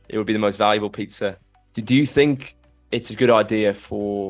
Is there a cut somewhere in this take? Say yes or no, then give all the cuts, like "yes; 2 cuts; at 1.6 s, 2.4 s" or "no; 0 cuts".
yes; 1 cut; at 1.4 s